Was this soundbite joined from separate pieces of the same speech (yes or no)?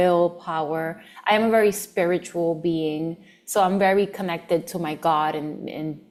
no